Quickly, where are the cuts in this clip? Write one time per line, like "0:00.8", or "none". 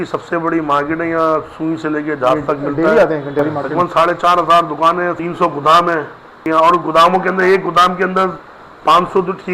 0:03.5
0:05.1
0:06.3